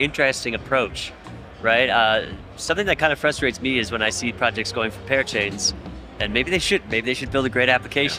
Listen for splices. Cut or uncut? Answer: uncut